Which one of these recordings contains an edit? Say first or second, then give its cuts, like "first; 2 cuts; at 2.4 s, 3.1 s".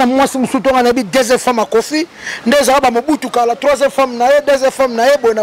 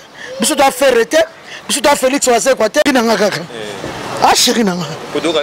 second; 1 cut; at 2.8 s